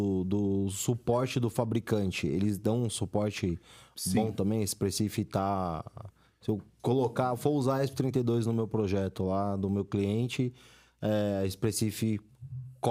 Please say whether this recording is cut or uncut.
uncut